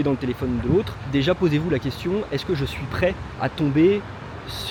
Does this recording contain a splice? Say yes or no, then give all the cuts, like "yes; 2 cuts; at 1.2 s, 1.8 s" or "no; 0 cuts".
no; 0 cuts